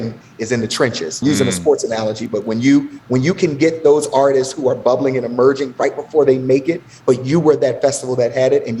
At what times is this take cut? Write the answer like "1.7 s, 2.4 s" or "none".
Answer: 1.2 s